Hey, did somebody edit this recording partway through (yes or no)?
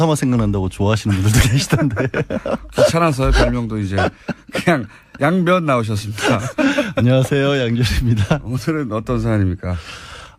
no